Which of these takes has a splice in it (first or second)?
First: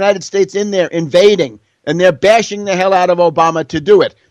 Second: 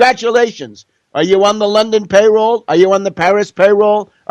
second